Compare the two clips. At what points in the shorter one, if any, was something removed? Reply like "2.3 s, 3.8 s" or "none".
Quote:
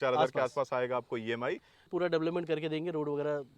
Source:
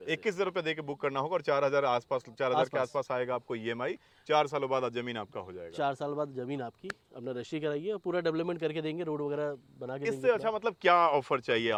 1.9 s